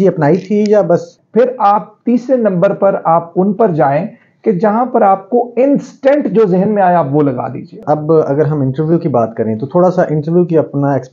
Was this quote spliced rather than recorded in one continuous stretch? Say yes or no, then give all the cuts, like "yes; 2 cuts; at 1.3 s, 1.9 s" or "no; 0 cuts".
yes; 2 cuts; at 1.2 s, 7.7 s